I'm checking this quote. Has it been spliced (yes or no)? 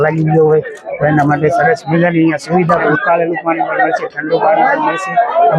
yes